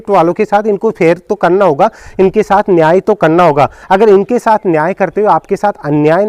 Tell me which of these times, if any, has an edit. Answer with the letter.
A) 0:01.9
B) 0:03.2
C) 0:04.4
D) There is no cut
D